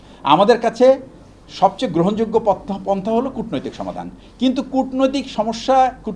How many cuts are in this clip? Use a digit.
0